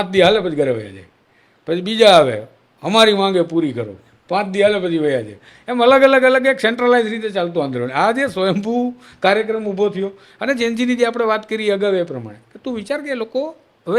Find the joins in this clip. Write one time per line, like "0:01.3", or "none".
none